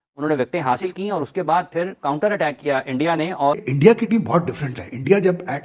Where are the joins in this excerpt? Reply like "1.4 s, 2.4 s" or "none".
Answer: 3.6 s